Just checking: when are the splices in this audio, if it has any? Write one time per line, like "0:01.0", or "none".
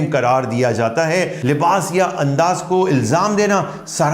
0:01.4